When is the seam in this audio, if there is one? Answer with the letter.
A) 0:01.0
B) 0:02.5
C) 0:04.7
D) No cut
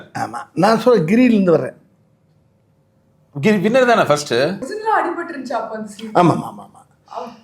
C